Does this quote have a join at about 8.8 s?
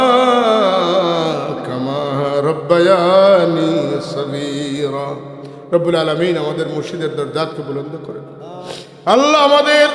yes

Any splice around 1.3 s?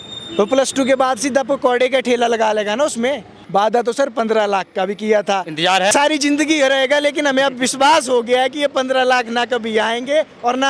no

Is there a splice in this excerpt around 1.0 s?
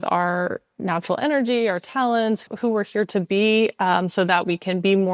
no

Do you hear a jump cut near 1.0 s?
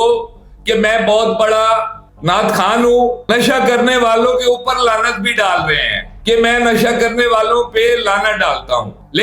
no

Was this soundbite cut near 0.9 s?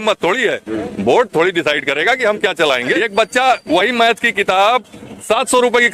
no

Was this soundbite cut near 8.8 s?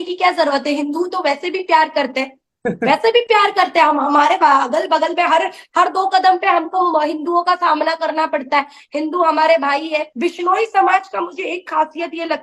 no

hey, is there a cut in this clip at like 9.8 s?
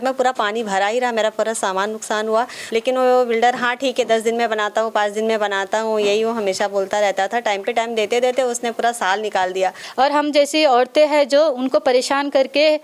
yes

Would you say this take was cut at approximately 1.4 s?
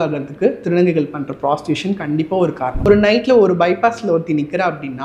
no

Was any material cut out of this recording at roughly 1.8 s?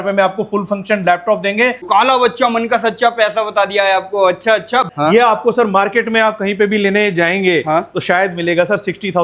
yes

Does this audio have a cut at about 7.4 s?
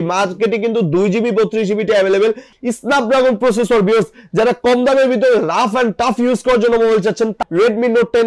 yes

